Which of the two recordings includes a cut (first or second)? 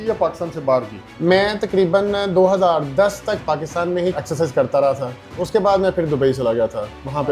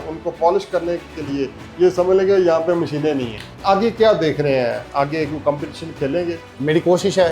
second